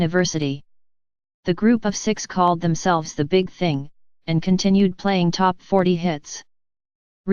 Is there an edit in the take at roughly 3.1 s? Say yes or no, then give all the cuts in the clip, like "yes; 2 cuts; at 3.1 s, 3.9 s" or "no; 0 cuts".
yes; 1 cut; at 3.1 s